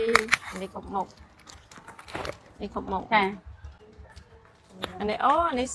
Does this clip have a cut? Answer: no; 0 cuts

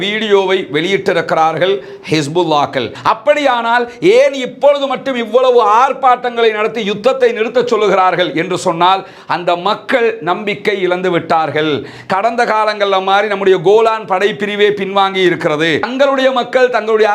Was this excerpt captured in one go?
no; 2 cuts; at 2.9 s, 15.9 s

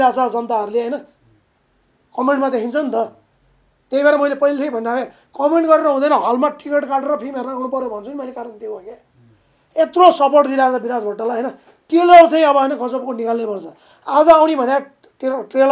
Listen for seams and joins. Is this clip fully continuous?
yes; 0 cuts

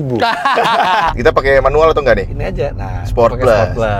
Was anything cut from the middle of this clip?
yes; 2 cuts; at 1.1 s, 2.4 s

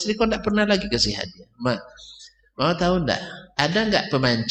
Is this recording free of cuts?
yes; 0 cuts

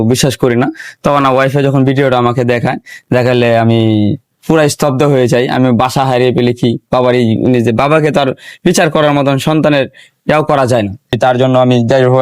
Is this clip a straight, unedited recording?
no; 1 cut; at 11.2 s

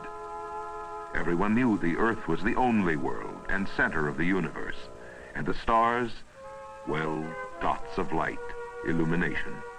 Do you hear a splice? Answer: no; 0 cuts

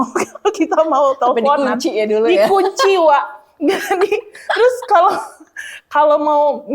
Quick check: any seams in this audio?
no; 0 cuts

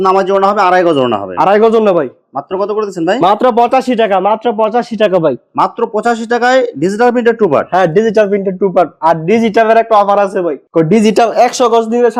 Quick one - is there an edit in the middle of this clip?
no; 0 cuts

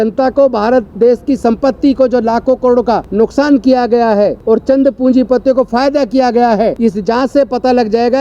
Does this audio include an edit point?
yes; 3 cuts; at 3.1 s, 4.4 s, 6.8 s

